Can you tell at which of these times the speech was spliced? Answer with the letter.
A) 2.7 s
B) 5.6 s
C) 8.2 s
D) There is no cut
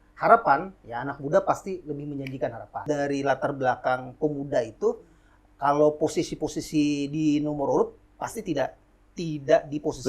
A